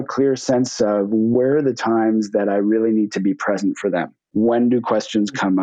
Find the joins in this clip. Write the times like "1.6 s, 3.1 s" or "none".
1.3 s, 4.2 s